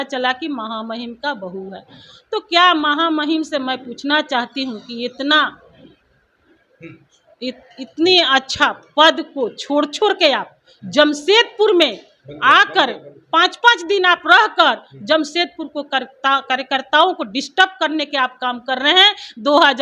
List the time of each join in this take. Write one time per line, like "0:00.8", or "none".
none